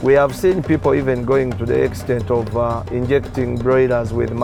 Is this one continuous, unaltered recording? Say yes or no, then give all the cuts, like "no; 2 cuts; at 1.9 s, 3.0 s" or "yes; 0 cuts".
yes; 0 cuts